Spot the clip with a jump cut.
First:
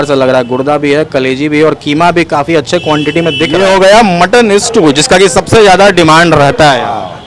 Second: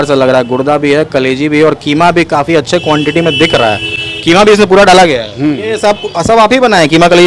first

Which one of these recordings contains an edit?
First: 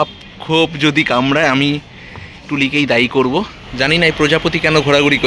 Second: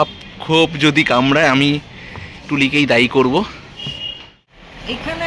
first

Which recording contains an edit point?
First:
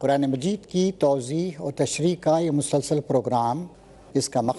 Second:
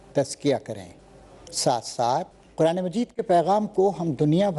second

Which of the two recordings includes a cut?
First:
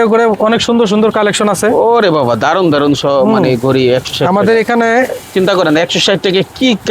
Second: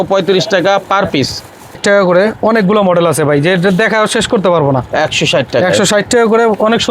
second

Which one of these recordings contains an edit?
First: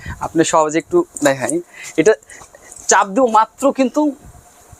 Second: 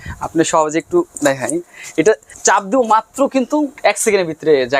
second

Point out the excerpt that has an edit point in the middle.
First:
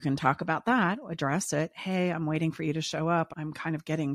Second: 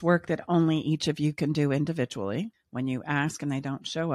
second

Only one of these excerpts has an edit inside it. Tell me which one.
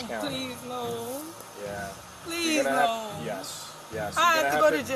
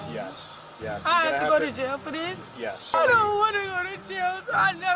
second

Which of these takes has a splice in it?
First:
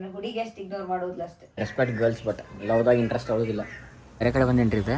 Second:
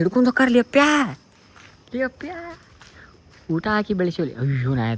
first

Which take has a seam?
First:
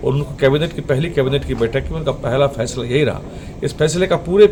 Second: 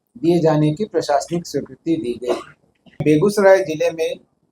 second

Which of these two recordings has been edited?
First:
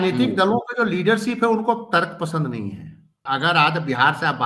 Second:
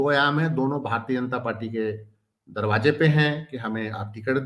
first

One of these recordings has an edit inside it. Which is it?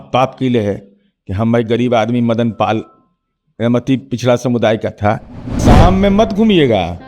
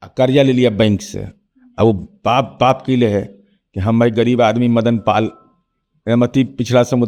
first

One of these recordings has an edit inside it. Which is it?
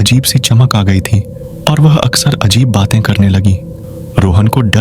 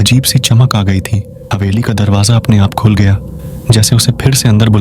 second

